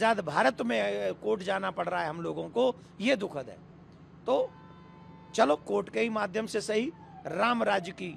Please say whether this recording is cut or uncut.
uncut